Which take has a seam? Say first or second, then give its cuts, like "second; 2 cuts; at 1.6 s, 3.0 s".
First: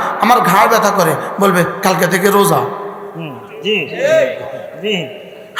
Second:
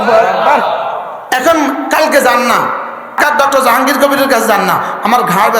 second; 1 cut; at 3.2 s